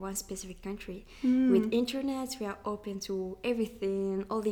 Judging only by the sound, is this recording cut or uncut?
uncut